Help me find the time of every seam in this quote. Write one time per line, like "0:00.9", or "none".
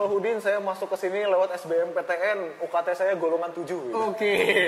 none